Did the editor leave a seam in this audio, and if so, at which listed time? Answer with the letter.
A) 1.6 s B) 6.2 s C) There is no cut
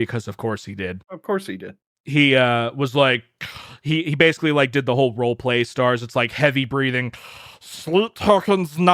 A